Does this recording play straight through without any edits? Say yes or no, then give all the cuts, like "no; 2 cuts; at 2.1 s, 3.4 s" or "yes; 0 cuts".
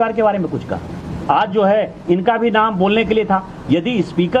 yes; 0 cuts